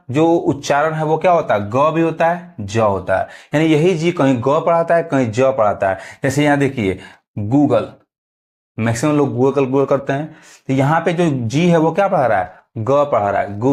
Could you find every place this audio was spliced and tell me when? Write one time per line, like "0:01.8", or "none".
none